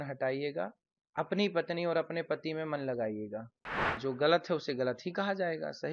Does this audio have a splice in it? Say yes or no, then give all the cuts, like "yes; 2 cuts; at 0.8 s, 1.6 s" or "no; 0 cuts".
yes; 1 cut; at 3.9 s